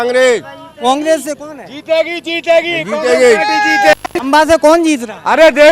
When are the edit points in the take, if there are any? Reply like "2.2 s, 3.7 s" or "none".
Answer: 4.1 s